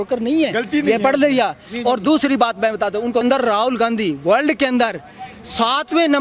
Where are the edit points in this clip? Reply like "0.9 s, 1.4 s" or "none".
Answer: 3.2 s